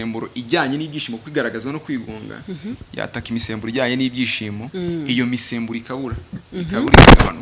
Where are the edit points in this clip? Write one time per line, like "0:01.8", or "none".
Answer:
none